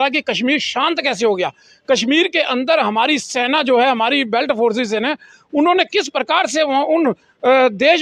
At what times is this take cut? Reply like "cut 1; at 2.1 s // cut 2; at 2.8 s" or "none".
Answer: none

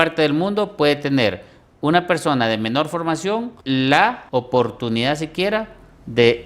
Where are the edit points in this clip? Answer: cut 1; at 3.5 s // cut 2; at 4.2 s

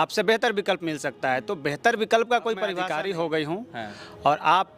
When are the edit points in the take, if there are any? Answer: cut 1; at 2.8 s

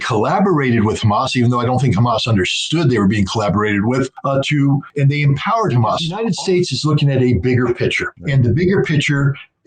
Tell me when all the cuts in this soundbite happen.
cut 1; at 6.1 s

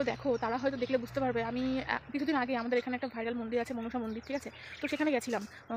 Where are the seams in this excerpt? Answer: none

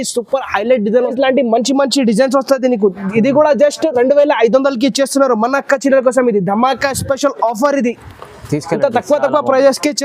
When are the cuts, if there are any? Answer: cut 1; at 1.1 s

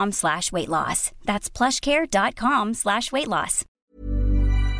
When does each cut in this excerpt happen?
cut 1; at 3.8 s

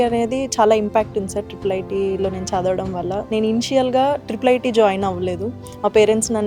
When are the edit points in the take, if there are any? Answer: none

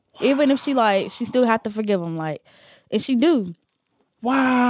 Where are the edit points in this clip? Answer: none

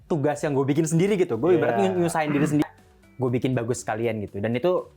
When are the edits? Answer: cut 1; at 2.6 s

